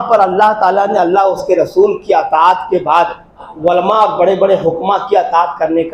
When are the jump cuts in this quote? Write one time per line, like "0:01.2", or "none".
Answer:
0:03.5